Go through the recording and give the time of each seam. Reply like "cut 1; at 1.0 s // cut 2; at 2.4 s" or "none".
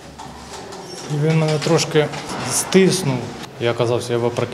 cut 1; at 2.2 s // cut 2; at 3.3 s